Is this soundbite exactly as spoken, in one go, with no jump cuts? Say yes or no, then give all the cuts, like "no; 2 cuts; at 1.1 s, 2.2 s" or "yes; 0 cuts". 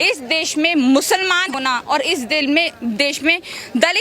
no; 1 cut; at 1.5 s